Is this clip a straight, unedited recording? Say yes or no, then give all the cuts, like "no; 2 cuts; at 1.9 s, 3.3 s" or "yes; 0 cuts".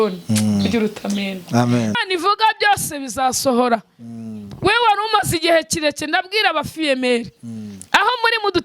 no; 1 cut; at 2.0 s